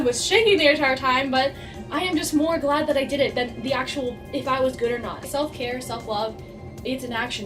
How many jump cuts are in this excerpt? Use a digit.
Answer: 1